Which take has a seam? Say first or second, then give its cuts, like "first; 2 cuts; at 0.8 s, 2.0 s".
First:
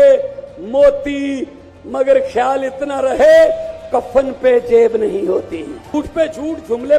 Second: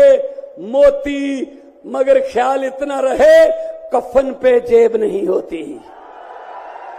first; 1 cut; at 5.9 s